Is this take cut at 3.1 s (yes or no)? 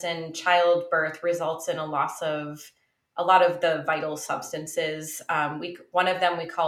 no